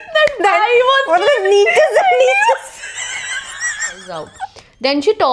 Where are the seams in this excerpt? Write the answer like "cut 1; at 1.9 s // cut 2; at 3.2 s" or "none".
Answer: cut 1; at 4.3 s